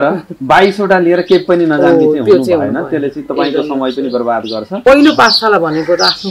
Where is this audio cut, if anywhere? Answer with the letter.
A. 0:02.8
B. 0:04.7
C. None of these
B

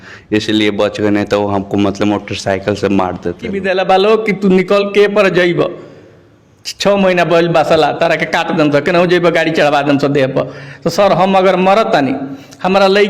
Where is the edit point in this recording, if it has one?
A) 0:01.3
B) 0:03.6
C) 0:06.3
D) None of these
B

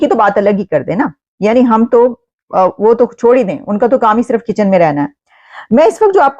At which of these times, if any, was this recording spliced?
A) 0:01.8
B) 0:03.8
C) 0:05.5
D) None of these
D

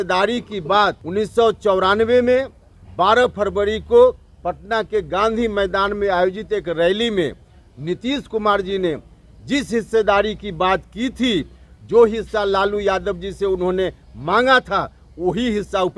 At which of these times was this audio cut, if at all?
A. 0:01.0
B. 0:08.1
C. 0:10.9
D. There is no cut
A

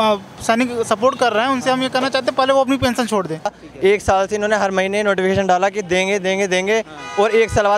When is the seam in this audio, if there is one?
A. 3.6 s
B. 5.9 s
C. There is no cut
A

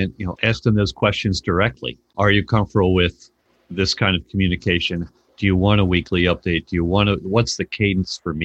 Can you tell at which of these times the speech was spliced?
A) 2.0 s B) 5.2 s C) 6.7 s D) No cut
A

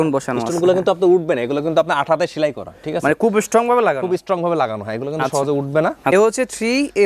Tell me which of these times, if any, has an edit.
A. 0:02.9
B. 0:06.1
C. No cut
B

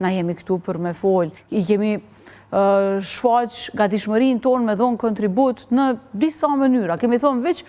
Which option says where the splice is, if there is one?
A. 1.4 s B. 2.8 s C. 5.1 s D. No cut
A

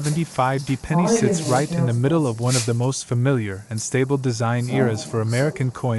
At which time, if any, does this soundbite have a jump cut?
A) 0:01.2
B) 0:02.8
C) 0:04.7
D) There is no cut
D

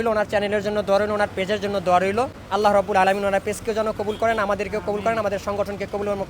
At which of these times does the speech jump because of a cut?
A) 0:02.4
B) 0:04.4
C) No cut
A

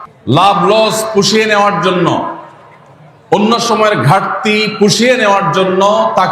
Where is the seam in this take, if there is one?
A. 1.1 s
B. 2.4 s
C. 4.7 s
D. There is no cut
D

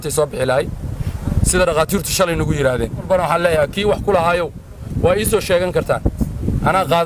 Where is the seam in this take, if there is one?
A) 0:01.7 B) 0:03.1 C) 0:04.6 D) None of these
B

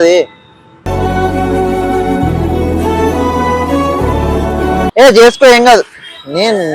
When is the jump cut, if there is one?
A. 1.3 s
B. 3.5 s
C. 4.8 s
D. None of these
C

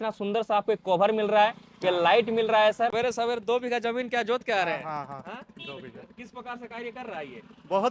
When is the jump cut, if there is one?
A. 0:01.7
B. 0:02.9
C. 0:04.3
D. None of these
B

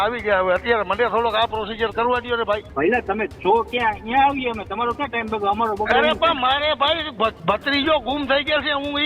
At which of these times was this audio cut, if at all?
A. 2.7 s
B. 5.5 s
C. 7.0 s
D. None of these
A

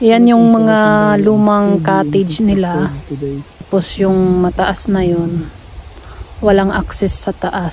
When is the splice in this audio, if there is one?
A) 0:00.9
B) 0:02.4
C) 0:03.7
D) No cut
C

